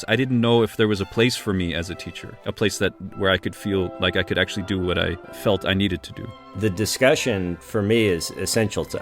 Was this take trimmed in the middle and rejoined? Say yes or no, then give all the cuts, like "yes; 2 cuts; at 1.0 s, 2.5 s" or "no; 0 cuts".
yes; 1 cut; at 6.4 s